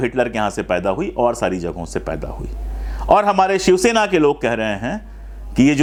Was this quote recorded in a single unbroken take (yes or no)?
yes